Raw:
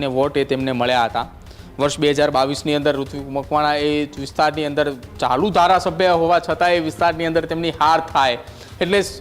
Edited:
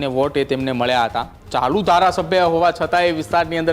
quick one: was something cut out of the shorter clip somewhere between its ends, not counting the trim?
yes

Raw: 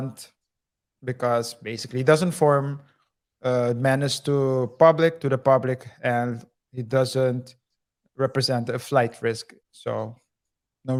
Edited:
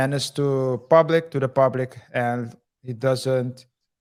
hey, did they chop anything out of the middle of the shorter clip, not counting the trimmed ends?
no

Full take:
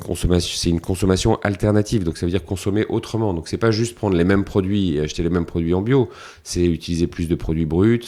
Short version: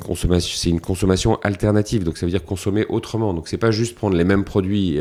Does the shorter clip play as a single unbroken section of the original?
yes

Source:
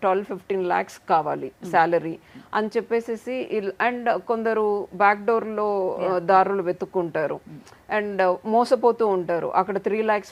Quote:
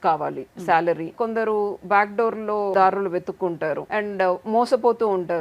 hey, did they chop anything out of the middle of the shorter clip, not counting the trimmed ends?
yes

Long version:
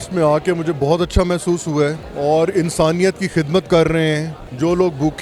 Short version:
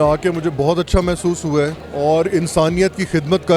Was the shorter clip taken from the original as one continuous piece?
yes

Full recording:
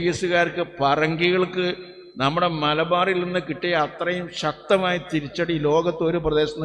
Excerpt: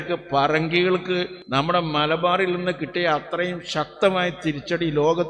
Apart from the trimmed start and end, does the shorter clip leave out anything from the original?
yes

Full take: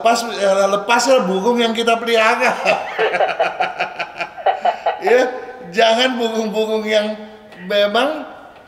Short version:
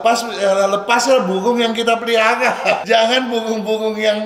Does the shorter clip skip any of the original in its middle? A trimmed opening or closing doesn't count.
yes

